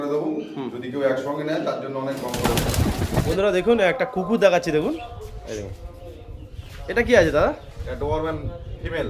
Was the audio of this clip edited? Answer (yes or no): yes